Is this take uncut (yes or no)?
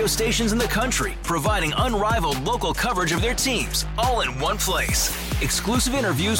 yes